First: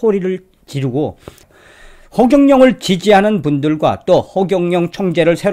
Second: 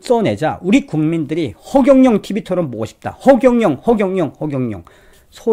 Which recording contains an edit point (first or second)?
first